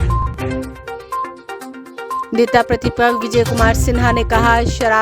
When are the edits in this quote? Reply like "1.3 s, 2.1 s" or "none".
2.1 s